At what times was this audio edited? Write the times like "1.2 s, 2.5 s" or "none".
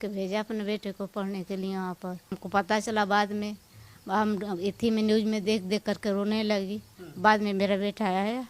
2.3 s